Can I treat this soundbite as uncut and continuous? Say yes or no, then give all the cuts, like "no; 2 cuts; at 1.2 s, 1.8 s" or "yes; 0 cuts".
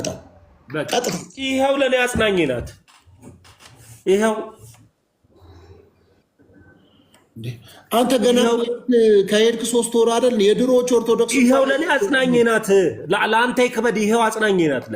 no; 1 cut; at 1.3 s